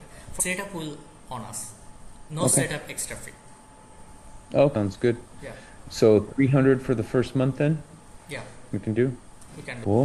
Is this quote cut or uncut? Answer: cut